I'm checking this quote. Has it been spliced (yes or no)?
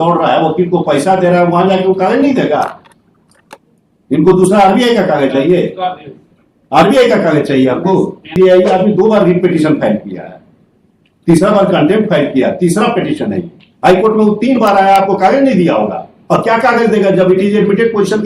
yes